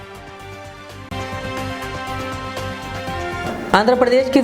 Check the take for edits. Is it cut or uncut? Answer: cut